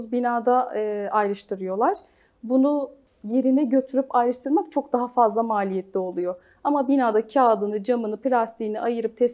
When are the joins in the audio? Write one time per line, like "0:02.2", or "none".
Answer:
0:03.0

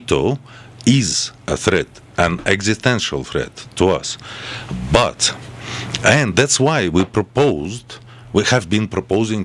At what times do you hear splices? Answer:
none

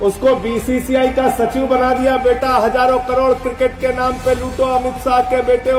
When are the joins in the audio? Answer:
none

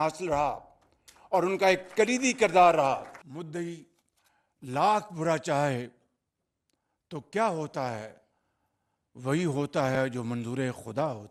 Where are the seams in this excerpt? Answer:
0:03.2

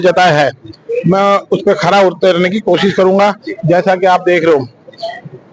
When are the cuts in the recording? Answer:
none

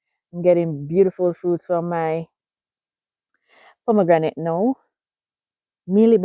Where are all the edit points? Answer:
none

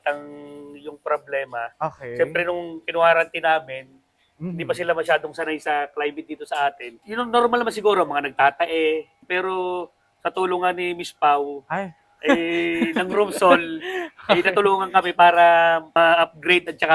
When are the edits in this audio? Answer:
0:06.9
0:09.2
0:15.9

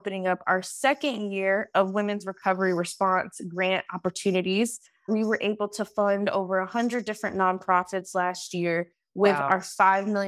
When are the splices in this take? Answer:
none

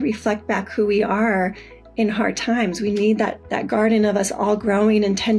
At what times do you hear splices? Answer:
0:03.5

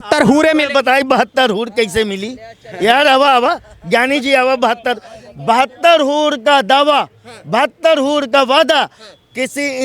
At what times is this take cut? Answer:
none

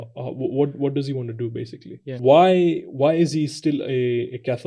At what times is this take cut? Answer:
0:02.2

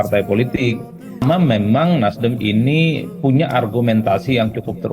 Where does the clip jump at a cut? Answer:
0:01.2

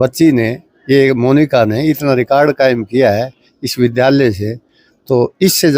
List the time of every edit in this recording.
none

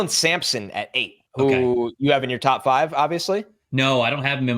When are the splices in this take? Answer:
0:01.2

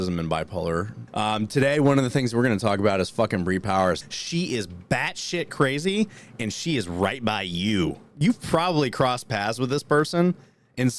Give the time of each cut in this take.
0:01.0
0:04.0
0:08.1

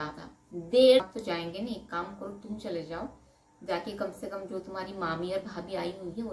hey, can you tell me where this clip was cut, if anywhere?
0:01.0

